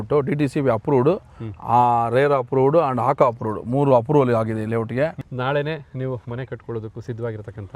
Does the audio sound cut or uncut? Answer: cut